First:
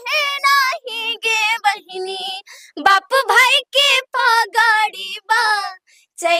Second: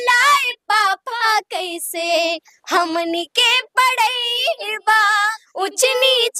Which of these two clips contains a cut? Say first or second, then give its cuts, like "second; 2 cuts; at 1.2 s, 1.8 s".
second; 1 cut; at 5.4 s